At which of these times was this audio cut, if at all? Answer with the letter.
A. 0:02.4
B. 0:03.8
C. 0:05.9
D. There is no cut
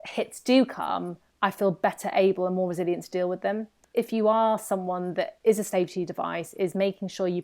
B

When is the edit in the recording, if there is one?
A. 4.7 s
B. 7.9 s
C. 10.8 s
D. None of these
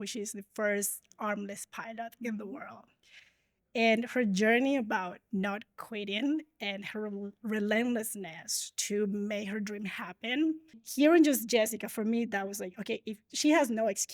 C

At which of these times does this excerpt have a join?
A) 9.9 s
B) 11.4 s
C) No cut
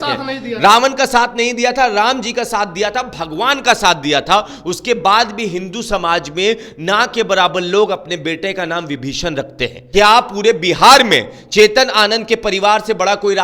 A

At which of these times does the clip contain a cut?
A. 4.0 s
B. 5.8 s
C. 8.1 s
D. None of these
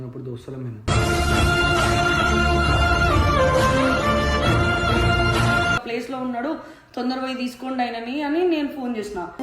B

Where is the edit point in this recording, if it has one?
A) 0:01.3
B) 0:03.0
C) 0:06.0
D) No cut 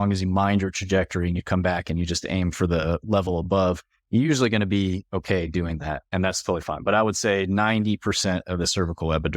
C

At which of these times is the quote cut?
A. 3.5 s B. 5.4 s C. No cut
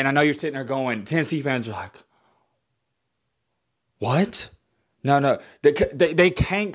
C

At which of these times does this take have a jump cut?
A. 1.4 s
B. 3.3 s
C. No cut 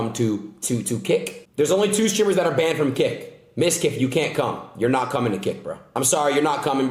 A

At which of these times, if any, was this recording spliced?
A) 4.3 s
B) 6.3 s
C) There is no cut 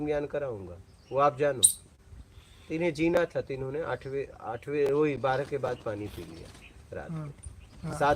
C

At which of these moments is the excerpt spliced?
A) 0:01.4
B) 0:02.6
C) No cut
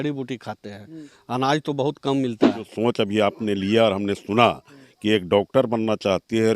B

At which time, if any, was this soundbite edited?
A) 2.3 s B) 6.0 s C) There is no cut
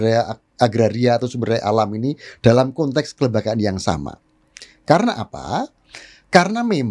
C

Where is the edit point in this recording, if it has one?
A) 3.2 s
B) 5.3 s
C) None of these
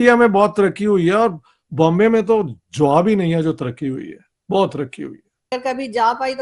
B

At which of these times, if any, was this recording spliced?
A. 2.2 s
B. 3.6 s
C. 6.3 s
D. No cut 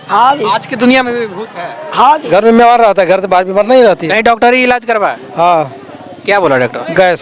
A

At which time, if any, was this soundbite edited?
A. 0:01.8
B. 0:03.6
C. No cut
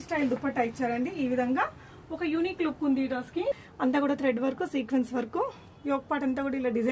B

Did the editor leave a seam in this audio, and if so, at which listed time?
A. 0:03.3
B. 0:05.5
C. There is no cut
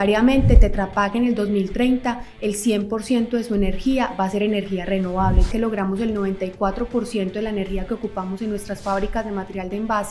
B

